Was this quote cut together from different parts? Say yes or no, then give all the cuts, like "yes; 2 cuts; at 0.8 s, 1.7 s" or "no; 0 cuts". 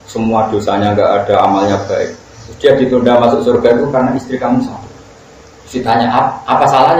no; 0 cuts